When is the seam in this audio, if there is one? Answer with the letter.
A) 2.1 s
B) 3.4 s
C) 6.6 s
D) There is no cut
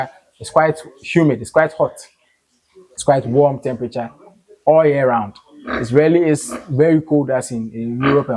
D